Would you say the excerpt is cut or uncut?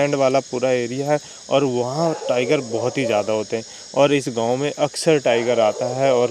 uncut